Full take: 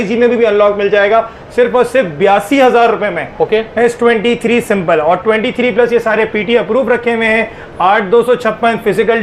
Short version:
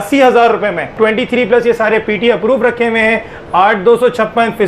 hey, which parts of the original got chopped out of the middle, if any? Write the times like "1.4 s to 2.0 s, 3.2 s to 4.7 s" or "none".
3.3 s to 5.2 s